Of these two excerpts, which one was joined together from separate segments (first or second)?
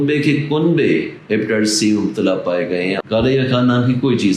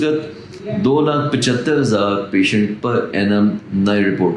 first